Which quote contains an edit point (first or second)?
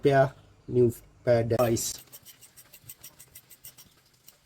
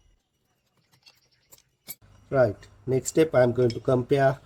first